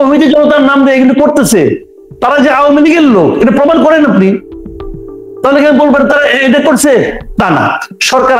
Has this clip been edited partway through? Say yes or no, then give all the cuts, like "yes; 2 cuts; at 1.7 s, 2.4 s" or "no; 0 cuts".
no; 0 cuts